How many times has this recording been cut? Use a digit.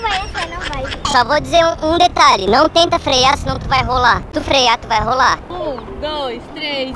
2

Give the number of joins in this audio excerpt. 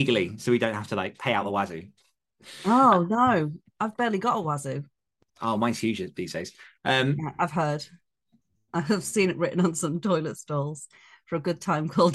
0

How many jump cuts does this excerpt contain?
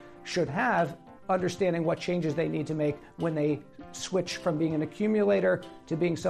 1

